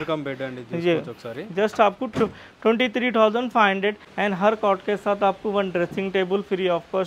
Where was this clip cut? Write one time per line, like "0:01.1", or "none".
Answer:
0:04.1